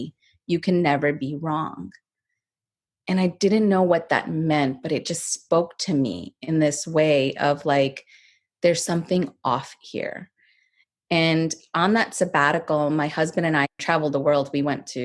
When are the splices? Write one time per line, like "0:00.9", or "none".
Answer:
0:13.8